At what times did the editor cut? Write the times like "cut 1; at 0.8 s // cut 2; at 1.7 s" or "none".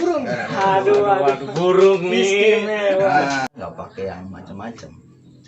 cut 1; at 3.5 s